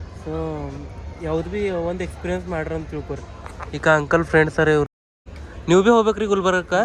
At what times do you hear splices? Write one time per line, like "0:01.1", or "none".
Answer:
none